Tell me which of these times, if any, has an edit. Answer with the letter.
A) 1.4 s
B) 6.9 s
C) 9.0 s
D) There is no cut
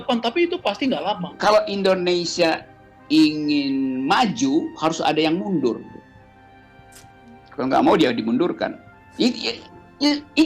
A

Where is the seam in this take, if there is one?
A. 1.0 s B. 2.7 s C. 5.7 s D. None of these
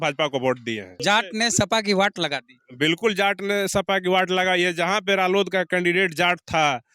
A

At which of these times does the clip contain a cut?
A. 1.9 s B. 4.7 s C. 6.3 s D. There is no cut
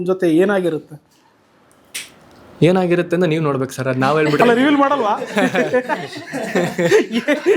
D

